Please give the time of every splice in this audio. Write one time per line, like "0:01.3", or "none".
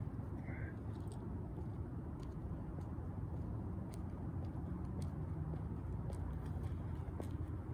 none